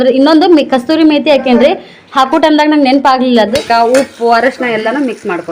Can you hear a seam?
yes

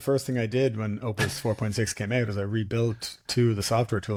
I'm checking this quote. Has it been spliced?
no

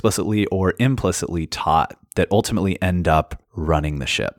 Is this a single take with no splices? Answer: no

